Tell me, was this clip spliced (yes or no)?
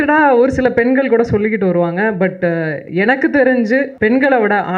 yes